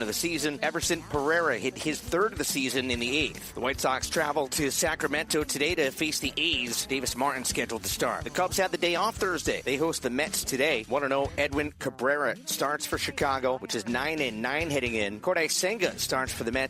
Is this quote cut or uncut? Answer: uncut